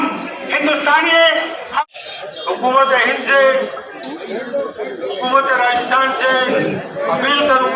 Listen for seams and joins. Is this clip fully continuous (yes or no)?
no